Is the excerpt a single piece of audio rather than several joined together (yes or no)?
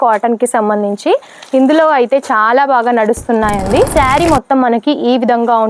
yes